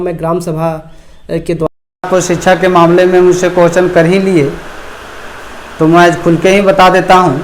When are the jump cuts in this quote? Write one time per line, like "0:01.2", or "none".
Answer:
0:01.7